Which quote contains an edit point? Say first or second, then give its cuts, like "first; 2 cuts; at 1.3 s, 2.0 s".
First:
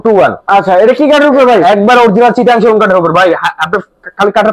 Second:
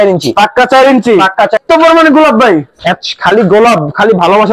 second; 1 cut; at 1.6 s